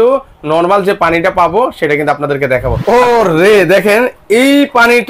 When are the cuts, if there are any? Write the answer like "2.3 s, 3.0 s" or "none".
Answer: 2.8 s